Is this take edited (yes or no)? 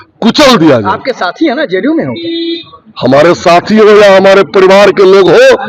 no